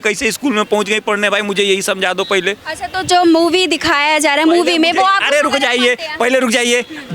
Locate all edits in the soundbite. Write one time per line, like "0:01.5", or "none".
none